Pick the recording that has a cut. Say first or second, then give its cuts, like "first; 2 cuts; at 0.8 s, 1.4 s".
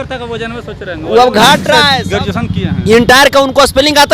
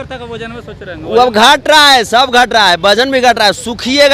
first; 1 cut; at 2.0 s